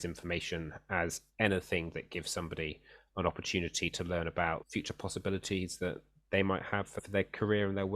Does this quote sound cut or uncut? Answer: cut